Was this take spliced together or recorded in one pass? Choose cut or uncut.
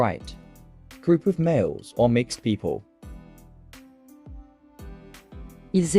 cut